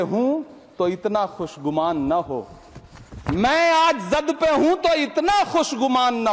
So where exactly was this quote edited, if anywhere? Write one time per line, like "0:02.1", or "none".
none

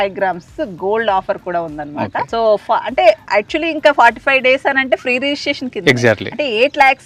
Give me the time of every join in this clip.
none

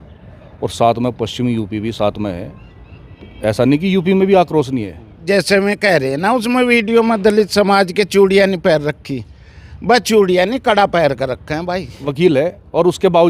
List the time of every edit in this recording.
0:05.2
0:12.0

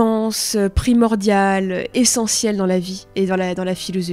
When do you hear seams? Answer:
none

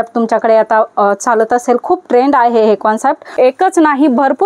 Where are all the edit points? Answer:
0:03.2

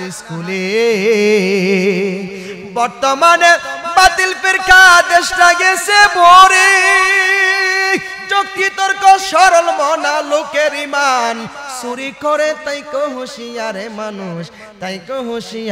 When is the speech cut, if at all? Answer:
none

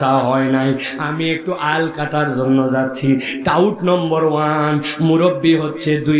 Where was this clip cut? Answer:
none

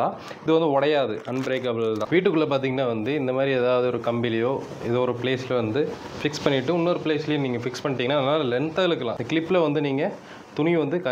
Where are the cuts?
0:02.0
0:09.2

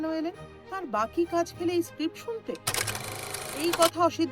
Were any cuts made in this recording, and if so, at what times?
0:02.9

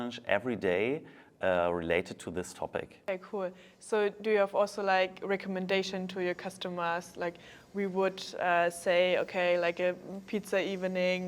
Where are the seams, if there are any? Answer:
0:02.9

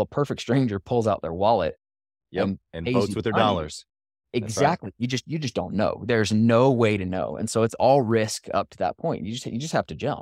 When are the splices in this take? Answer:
none

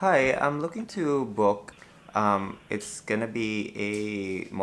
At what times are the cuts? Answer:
0:01.7

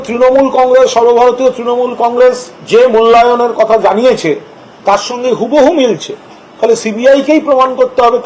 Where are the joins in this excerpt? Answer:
none

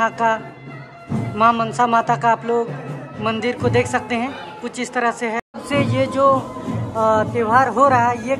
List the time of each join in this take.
0:05.6

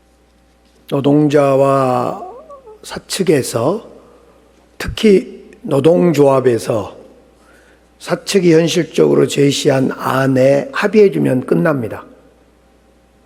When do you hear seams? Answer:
none

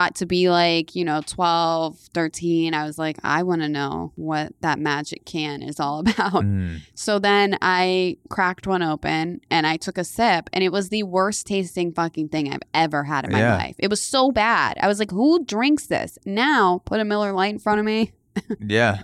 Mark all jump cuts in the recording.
0:04.1

